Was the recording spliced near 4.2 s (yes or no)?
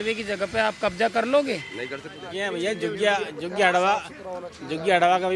no